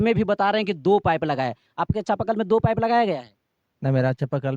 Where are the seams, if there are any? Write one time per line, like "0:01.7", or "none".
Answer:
none

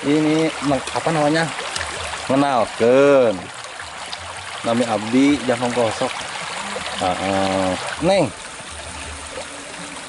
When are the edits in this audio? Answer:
0:07.9

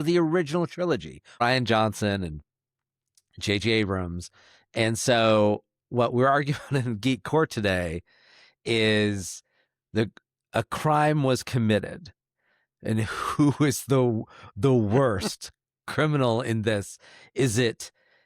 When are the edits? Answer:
0:01.4

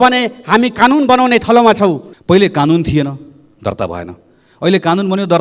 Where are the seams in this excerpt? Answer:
0:02.1

